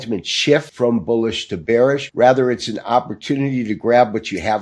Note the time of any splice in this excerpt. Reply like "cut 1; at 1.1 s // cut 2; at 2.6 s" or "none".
cut 1; at 2.1 s